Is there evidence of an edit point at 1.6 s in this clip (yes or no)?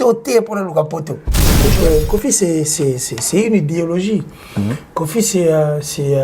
yes